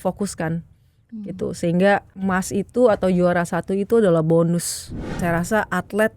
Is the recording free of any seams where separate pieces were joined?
no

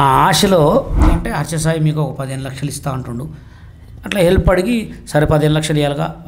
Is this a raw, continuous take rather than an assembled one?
no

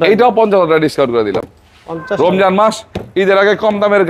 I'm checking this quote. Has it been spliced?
no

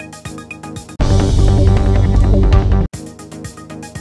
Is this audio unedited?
yes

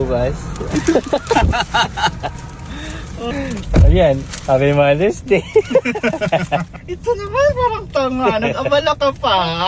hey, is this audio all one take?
no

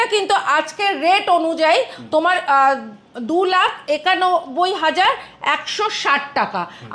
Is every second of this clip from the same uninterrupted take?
yes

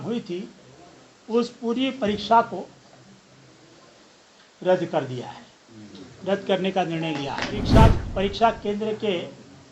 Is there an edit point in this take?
yes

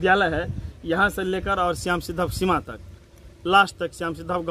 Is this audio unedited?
yes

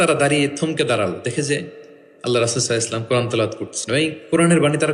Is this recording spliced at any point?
no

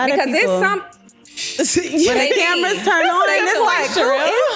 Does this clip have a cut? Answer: no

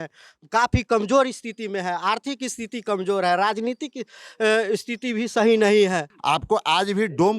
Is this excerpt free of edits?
no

